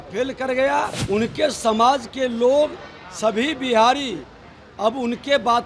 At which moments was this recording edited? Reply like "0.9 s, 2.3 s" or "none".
1.0 s